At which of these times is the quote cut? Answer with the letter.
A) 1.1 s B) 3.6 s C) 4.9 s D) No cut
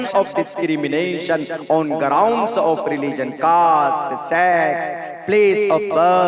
D